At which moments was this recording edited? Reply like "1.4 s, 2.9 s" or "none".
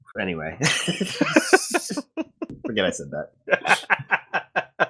1.1 s